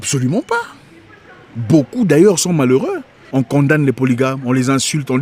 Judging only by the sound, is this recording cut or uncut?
cut